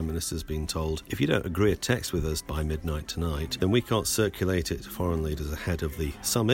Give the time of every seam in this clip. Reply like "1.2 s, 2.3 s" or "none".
1.1 s, 2.4 s, 3.5 s